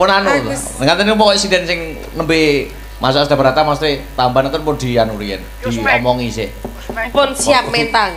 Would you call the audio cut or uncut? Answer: uncut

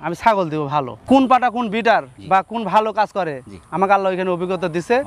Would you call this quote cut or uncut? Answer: cut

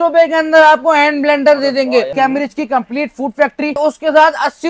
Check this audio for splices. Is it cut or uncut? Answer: cut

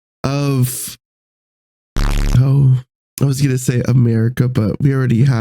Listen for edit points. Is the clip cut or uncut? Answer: cut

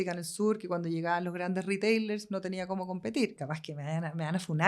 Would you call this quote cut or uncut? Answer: cut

